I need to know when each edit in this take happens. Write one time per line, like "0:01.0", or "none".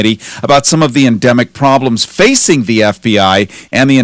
none